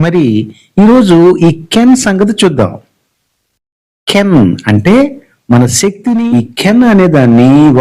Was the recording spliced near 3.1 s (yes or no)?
no